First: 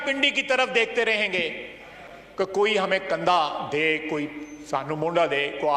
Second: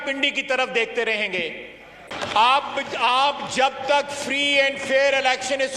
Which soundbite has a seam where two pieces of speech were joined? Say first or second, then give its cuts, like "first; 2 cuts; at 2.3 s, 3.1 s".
second; 1 cut; at 2.1 s